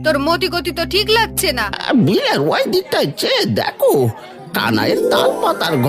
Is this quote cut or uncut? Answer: cut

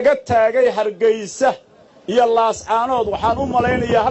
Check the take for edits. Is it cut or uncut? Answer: uncut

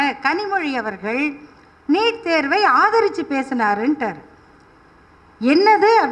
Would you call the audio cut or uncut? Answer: uncut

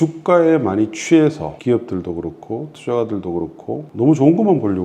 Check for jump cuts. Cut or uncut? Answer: cut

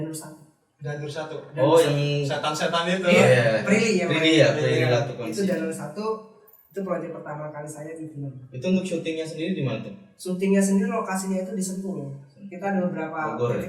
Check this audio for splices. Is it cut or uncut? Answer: uncut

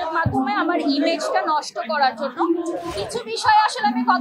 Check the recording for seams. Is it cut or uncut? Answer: cut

